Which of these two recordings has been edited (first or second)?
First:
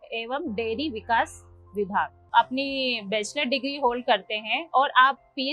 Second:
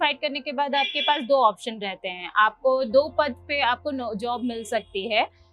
first